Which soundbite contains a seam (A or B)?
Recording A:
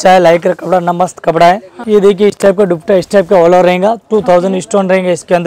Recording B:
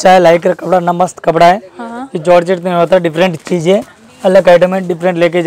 A